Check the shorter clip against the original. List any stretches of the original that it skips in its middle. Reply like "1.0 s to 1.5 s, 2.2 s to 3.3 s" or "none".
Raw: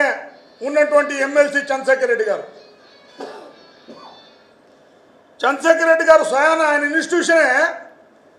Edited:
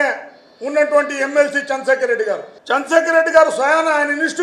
2.5 s to 5.3 s

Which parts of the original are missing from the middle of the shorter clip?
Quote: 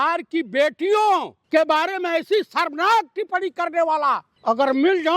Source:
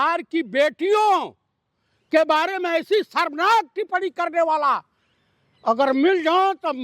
1.4 s to 2.0 s, 4.9 s to 5.5 s

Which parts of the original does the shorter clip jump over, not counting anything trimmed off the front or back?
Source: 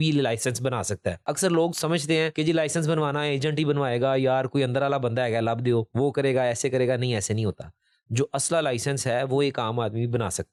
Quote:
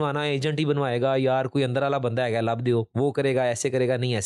none

